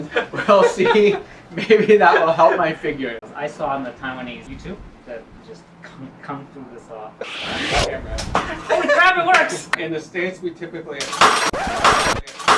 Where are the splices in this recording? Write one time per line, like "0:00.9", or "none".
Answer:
0:03.2
0:04.4
0:07.2
0:09.8